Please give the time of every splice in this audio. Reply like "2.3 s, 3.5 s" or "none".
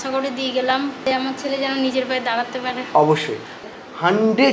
1.1 s, 2.8 s, 3.6 s

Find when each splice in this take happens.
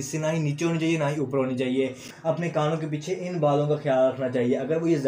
2.1 s

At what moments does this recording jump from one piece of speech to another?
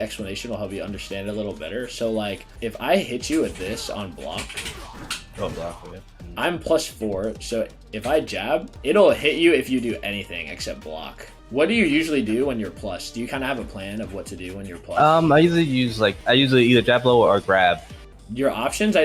2.5 s, 11.3 s, 16.2 s, 17.9 s

